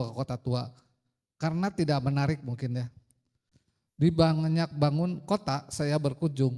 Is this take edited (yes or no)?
no